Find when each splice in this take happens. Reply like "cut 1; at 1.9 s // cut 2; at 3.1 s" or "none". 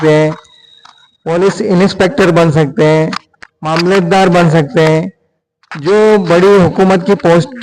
none